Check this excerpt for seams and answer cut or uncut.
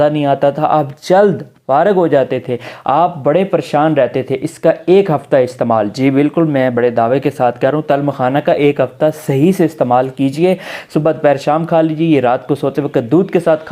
uncut